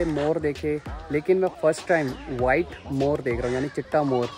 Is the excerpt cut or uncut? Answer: uncut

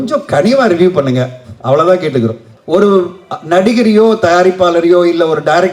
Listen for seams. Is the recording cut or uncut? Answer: cut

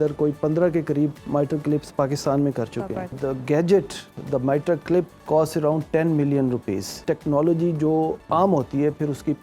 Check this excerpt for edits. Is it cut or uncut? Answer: cut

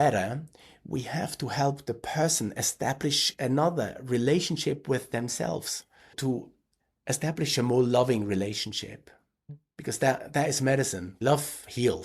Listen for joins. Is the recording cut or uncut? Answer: cut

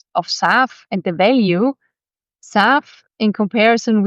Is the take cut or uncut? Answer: uncut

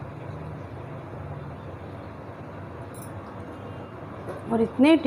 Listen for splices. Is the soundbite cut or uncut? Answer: cut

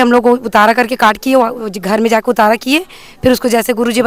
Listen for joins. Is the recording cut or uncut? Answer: uncut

